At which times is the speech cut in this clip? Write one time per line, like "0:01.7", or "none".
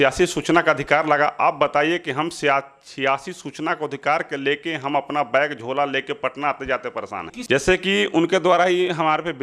0:07.4